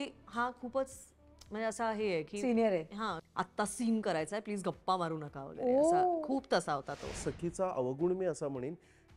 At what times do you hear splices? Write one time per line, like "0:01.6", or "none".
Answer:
0:03.2
0:07.2